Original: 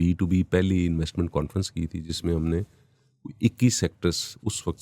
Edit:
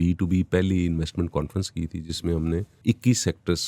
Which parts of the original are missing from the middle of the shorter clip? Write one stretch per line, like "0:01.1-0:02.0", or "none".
0:02.7-0:03.3